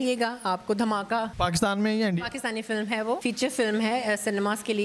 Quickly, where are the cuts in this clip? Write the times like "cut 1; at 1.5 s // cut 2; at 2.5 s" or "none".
cut 1; at 1.3 s // cut 2; at 3.2 s